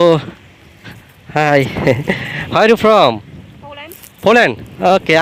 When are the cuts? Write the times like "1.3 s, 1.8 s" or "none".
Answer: none

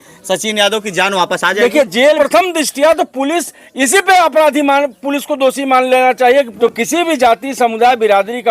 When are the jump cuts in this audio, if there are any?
2.2 s, 6.5 s

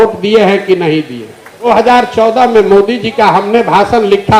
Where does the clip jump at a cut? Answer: 1.7 s

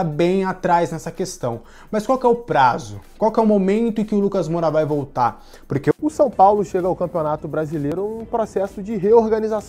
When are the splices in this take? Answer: 5.9 s

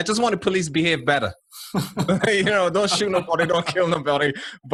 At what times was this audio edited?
none

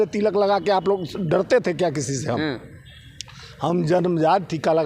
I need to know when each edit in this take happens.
none

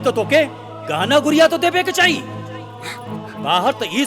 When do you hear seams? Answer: none

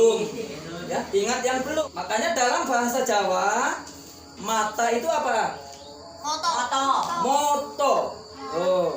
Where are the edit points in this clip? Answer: 1.8 s

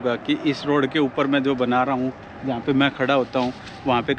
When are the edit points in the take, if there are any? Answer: none

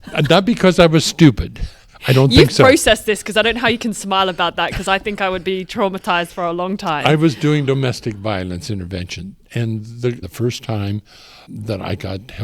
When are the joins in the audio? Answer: 10.3 s, 11.5 s

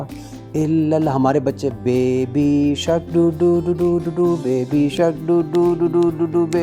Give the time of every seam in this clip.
none

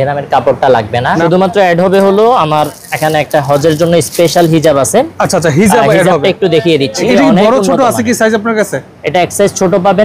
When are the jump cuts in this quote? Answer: 1.2 s, 7.0 s

